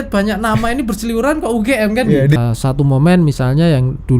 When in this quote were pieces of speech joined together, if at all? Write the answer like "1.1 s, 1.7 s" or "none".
2.4 s